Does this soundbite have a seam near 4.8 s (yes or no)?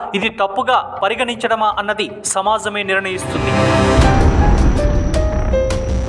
no